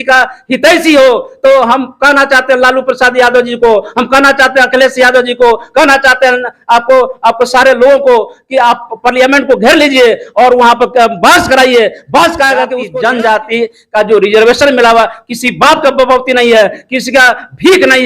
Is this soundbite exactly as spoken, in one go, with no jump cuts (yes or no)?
no